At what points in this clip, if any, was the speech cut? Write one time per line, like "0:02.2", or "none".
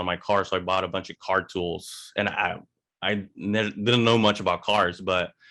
none